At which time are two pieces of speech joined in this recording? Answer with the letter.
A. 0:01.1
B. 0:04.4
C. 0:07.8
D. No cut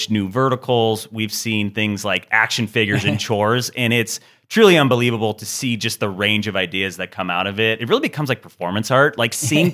C